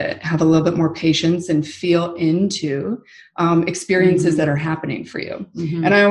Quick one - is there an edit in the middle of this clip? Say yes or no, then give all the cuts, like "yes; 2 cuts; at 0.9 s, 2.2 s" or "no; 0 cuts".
no; 0 cuts